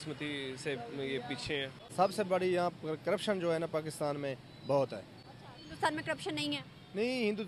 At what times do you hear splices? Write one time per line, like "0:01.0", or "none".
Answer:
0:01.8